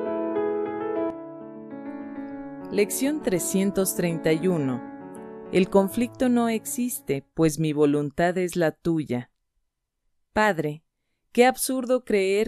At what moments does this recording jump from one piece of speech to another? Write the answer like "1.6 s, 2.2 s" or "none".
2.7 s